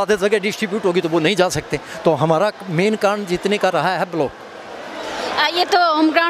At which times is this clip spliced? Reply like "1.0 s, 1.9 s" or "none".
none